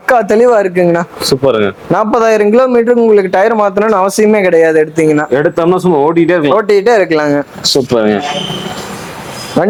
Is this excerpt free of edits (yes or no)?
yes